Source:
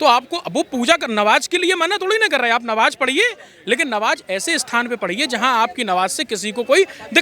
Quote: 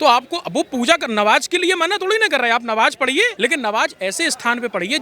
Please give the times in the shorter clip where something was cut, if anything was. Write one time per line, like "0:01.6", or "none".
0:03.3